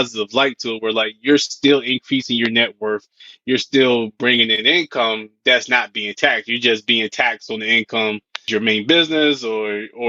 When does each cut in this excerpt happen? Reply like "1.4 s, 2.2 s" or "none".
8.4 s

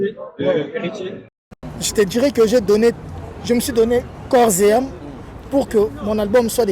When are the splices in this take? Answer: 1.4 s

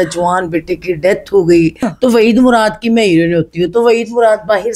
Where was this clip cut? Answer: 1.8 s

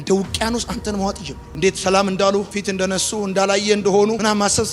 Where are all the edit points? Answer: none

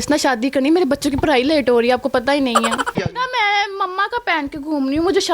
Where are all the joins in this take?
3.0 s

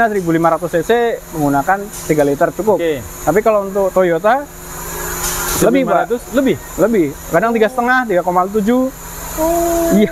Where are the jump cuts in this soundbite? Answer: none

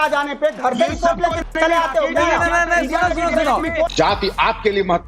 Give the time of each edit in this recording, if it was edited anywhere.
2.5 s, 3.9 s

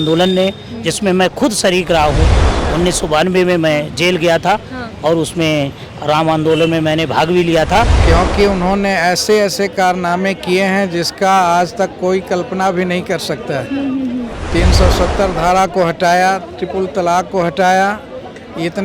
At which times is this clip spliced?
8.0 s

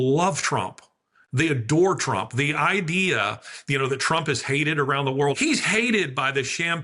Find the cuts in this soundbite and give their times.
5.4 s

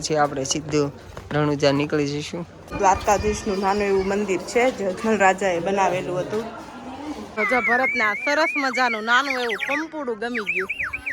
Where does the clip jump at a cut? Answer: 2.7 s, 7.3 s

